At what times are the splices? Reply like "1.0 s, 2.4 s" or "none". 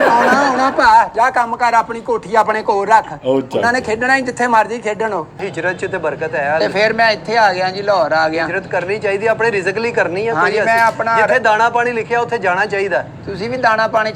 5.5 s